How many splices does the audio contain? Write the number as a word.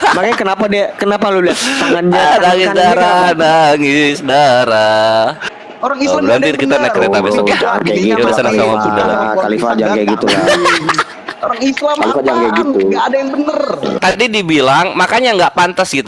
two